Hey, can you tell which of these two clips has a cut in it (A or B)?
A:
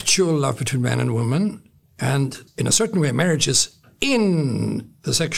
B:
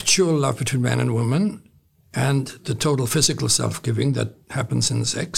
A